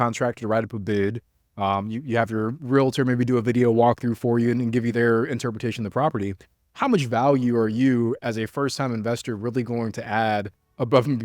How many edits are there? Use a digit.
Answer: 1